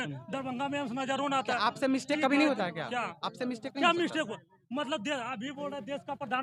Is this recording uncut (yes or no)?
yes